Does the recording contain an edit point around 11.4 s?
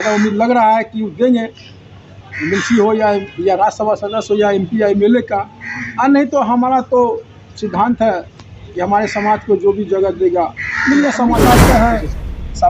yes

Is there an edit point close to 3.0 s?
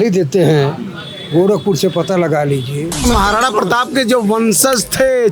yes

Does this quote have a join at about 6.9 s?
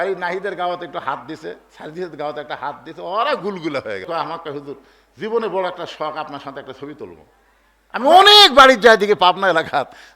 no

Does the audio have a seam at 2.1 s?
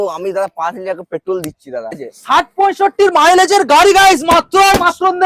yes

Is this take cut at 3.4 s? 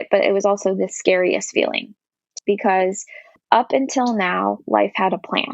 yes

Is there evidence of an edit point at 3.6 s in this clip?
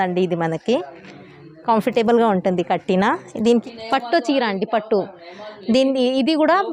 yes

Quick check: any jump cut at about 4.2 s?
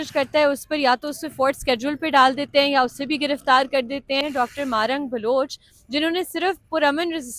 yes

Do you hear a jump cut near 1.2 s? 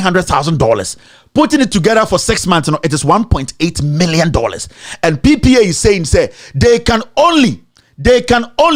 no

